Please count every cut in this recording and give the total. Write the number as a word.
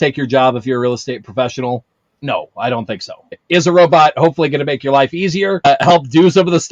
one